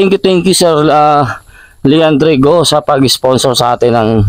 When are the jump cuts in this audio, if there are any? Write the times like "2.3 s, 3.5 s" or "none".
none